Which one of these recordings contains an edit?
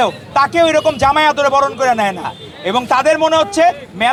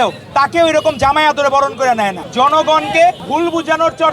second; 2 cuts; at 2.2 s, 3.2 s

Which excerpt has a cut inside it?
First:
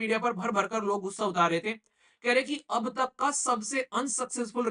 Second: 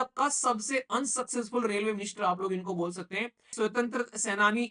second; 1 cut; at 3.5 s

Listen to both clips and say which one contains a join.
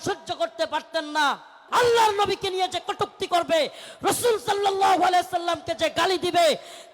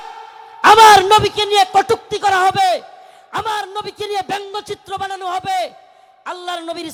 first; 1 cut; at 1.6 s

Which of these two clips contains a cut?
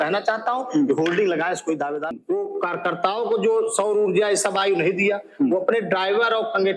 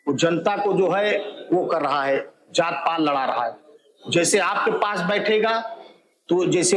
first; 1 cut; at 2.1 s

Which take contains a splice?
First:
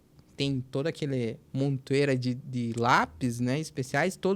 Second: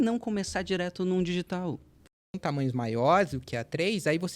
second; 1 cut; at 2.0 s

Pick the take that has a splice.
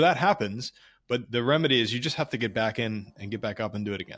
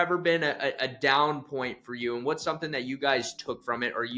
first; 1 cut; at 1.2 s

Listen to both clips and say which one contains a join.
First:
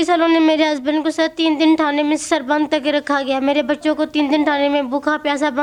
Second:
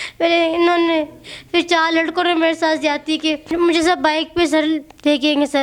second; 1 cut; at 3.5 s

